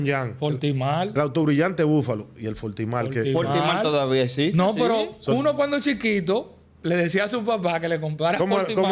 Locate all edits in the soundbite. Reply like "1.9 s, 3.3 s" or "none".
none